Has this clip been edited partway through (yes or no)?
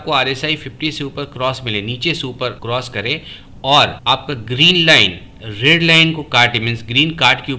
yes